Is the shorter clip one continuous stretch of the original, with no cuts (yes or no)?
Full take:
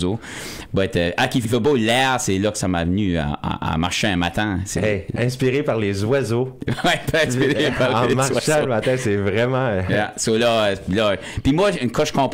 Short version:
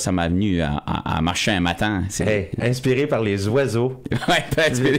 yes